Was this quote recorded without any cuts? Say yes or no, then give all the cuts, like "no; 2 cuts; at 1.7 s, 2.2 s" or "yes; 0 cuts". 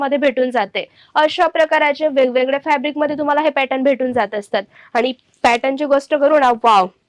yes; 0 cuts